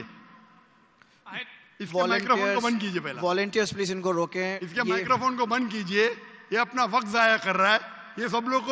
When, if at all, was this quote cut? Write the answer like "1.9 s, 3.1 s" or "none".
none

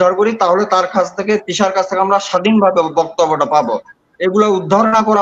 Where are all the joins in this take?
none

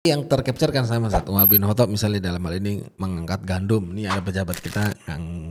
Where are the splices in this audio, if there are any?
none

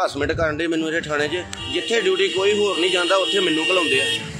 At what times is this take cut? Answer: 1.4 s

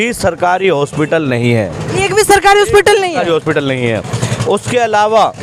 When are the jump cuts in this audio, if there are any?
none

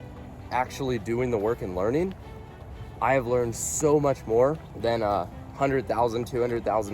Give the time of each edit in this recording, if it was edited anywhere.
4.7 s

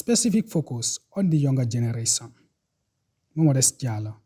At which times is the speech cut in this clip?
none

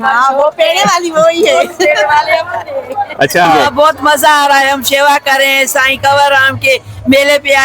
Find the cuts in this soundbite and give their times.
3.7 s

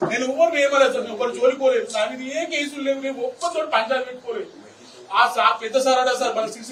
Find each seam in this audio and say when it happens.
none

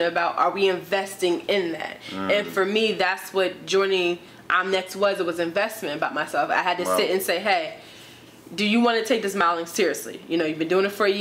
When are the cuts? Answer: none

